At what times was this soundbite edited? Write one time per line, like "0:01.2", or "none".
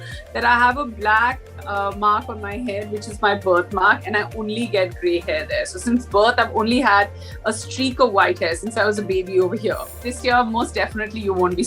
0:10.0